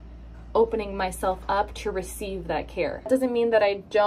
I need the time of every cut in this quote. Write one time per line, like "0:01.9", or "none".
0:03.1